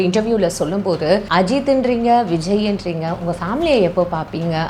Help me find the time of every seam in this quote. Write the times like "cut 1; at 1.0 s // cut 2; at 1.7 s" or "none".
cut 1; at 1.3 s